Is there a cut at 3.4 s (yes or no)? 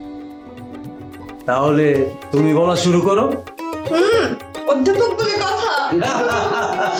no